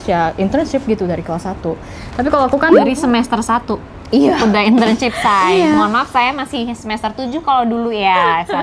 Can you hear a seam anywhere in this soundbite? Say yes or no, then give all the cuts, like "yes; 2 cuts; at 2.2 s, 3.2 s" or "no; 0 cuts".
no; 0 cuts